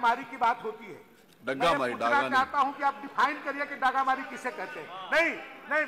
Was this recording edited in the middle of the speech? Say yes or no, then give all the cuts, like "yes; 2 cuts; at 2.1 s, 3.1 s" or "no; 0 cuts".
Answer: no; 0 cuts